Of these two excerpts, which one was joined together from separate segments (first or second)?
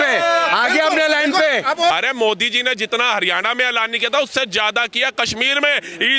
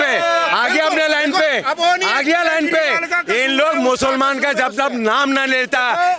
first